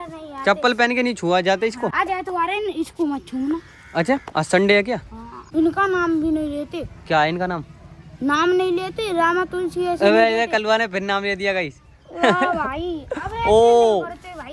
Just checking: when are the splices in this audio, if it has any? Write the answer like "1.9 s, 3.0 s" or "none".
1.9 s, 5.4 s